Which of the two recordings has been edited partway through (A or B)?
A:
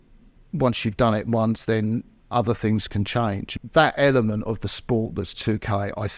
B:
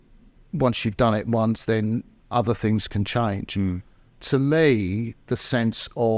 A